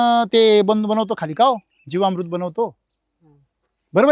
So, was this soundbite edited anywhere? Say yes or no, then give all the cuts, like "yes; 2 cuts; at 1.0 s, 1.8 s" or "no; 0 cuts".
no; 0 cuts